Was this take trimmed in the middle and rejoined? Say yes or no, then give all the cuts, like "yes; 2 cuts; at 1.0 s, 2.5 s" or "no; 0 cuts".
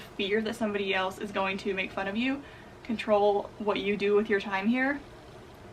no; 0 cuts